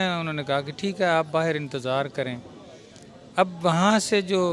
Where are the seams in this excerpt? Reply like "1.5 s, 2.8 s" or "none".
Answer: none